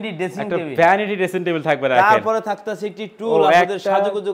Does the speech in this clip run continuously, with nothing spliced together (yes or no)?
yes